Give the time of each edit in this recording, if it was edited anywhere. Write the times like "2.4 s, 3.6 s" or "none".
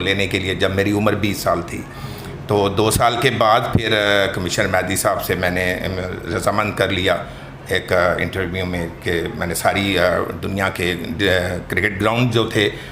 none

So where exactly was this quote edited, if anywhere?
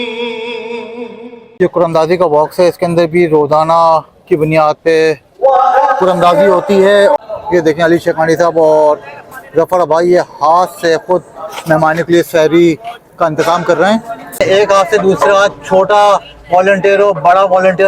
1.4 s, 7.2 s, 14.4 s

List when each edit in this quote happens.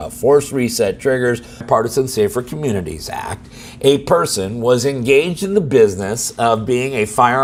none

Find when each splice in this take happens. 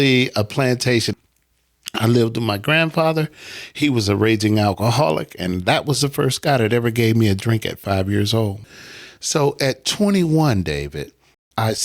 1.1 s, 8.6 s

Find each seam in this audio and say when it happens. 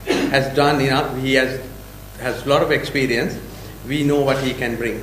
none

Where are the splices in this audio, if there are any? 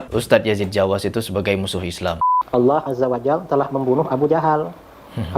2.2 s

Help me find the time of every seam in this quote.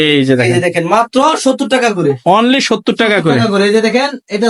none

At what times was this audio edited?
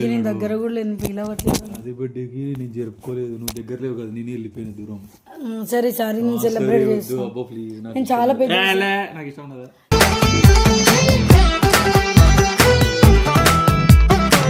none

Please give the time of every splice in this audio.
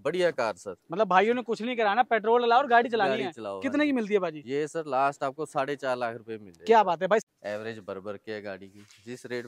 7.2 s

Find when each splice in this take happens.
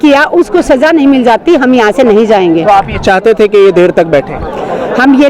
none

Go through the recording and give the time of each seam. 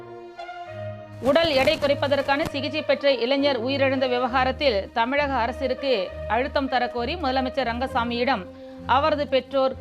1.1 s

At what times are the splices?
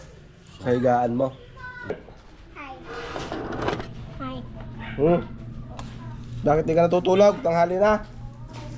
1.9 s

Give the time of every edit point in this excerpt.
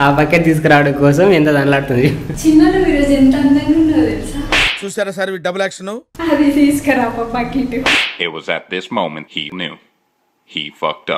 2.3 s, 6.1 s, 7.7 s

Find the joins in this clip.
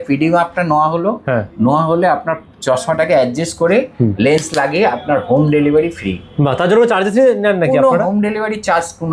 none

